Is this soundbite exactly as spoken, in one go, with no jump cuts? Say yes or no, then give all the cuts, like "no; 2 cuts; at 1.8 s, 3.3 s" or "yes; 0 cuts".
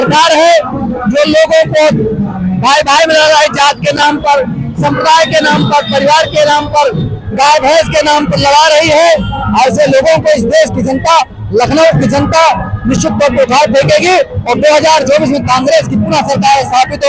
yes; 0 cuts